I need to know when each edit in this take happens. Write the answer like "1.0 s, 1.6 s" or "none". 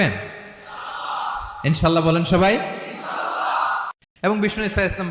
4.0 s